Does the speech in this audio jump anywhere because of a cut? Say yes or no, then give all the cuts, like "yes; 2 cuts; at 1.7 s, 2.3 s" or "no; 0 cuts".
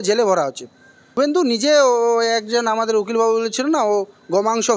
yes; 1 cut; at 1.3 s